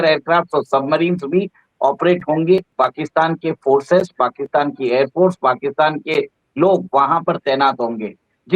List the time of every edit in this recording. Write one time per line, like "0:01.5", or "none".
0:02.7